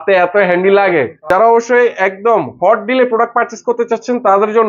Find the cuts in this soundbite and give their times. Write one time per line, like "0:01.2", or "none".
0:01.2